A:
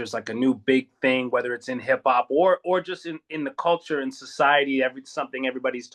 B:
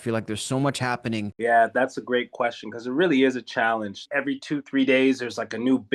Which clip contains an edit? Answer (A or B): B